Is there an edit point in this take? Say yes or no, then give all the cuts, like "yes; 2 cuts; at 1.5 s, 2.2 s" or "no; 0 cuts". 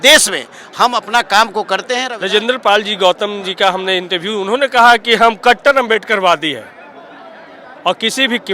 yes; 1 cut; at 2.1 s